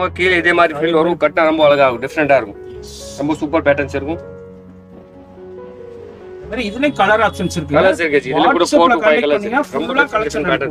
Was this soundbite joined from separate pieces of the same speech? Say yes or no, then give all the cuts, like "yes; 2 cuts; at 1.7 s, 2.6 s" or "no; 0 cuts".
no; 0 cuts